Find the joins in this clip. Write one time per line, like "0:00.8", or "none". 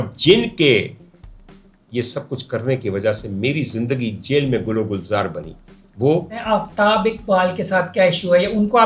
0:06.4